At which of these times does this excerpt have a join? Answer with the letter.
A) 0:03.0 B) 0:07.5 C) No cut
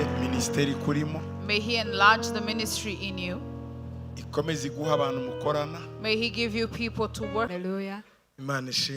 B